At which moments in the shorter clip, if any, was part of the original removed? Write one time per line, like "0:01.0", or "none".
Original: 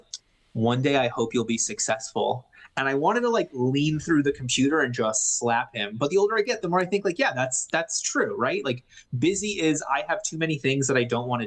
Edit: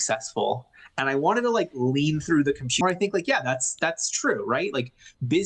0:02.8